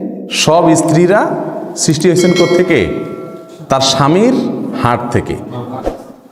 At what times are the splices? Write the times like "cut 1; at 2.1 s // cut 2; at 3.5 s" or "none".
none